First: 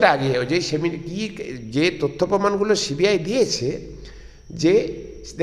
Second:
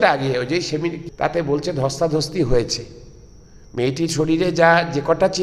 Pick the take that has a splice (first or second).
second